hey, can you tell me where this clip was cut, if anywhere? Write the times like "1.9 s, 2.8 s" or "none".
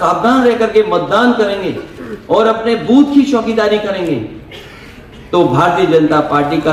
none

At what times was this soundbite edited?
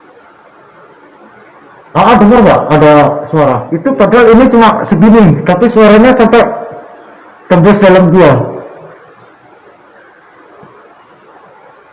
3.7 s

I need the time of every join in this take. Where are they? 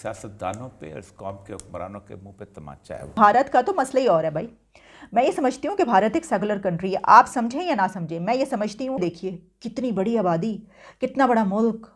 3.2 s, 9.0 s

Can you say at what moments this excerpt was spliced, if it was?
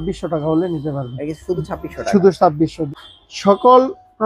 2.8 s

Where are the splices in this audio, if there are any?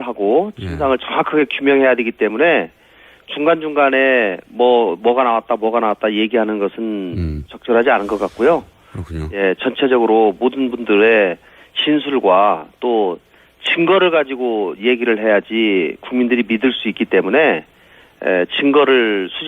4.0 s

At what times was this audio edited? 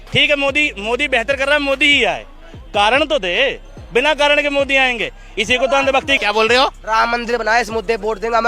6.3 s

